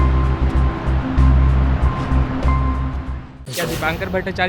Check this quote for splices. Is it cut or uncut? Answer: cut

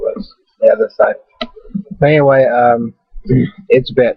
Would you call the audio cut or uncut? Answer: cut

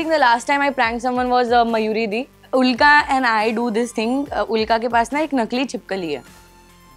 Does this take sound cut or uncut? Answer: cut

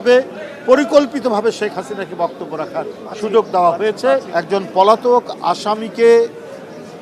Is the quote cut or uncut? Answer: cut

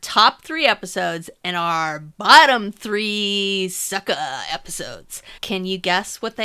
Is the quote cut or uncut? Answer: cut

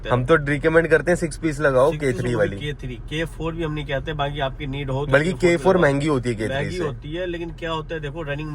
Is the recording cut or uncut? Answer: uncut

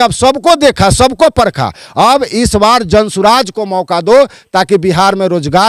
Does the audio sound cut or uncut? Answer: uncut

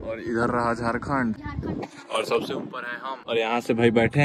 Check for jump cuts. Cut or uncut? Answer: cut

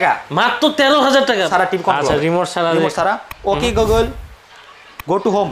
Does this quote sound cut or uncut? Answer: cut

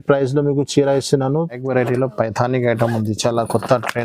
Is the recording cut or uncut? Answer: cut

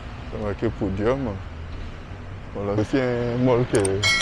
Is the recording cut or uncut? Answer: cut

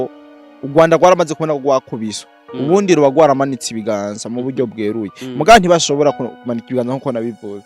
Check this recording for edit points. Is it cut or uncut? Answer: uncut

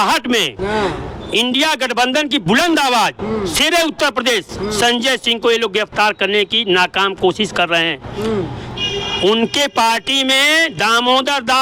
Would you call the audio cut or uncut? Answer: uncut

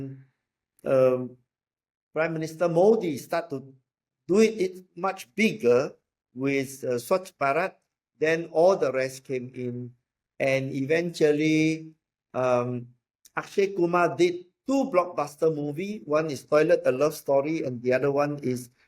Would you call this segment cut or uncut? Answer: uncut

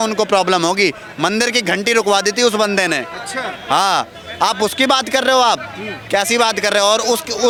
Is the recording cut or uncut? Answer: uncut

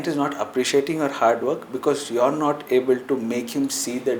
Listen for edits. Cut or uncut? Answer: uncut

